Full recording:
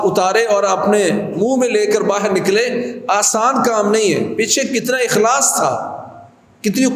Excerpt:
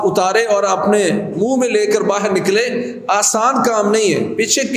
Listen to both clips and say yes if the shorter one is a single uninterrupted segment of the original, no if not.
yes